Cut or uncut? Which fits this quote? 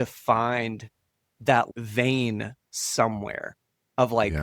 uncut